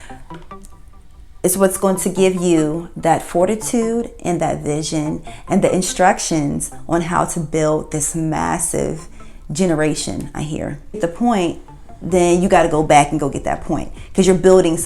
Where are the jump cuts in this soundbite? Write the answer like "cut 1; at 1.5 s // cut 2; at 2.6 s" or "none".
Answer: cut 1; at 11.0 s